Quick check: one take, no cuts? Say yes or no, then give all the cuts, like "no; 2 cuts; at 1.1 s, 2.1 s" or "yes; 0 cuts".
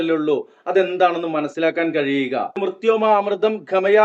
no; 1 cut; at 2.6 s